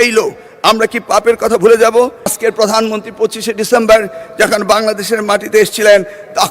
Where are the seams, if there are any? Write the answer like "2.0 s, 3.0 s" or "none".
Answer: 2.3 s